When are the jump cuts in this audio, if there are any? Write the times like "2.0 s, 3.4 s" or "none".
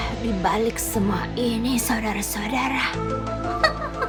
none